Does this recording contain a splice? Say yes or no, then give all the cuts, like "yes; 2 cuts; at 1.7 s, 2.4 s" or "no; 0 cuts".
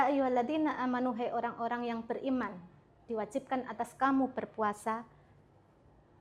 no; 0 cuts